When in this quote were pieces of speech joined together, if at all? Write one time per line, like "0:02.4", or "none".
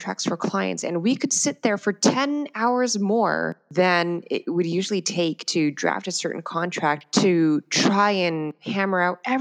0:03.6